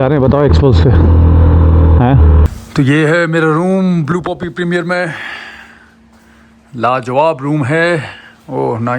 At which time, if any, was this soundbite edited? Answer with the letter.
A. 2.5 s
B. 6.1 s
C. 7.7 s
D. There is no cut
A